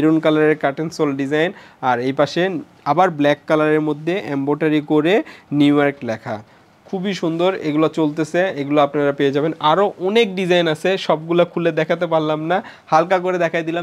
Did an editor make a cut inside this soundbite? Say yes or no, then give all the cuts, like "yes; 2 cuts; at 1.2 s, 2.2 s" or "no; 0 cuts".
no; 0 cuts